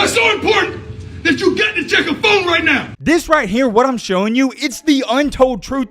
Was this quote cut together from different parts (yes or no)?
yes